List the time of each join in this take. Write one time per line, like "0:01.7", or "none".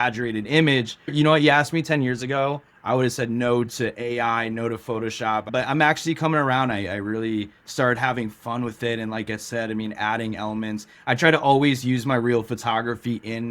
0:01.1
0:05.5